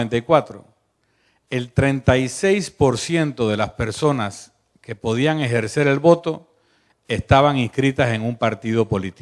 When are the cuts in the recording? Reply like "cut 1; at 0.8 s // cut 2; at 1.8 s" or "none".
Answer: cut 1; at 6.0 s